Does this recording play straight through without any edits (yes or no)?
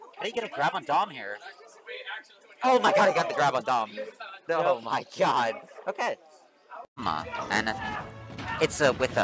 no